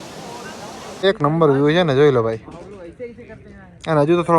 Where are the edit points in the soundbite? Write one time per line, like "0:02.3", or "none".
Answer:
0:01.0